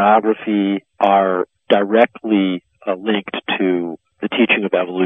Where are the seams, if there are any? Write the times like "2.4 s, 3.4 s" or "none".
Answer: 0.9 s, 4.0 s